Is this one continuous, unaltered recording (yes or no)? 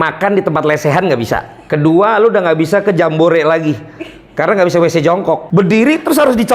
no